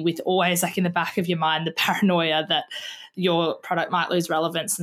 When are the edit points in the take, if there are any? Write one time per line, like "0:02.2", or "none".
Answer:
none